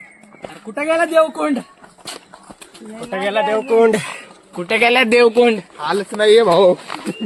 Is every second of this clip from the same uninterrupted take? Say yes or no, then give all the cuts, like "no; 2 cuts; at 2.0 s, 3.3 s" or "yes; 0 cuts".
yes; 0 cuts